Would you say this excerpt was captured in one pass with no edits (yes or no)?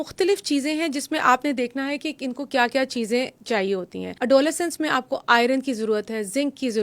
no